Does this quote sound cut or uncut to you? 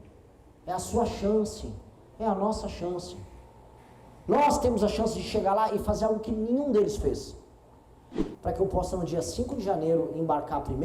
cut